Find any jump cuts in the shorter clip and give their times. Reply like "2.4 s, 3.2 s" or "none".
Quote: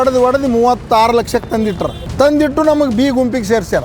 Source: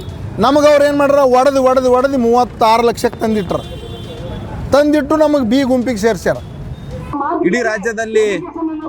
2.0 s